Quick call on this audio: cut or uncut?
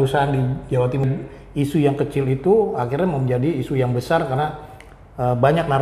cut